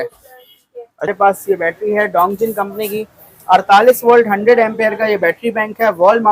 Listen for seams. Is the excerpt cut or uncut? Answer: cut